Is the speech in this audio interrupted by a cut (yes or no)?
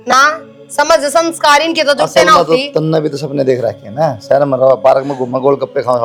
no